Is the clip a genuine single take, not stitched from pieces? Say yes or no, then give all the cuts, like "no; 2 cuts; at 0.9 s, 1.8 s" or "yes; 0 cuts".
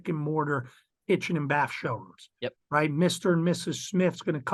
yes; 0 cuts